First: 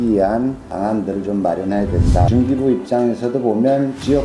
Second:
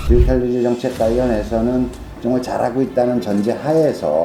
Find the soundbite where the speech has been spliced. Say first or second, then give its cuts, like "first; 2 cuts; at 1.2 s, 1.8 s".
first; 1 cut; at 2.3 s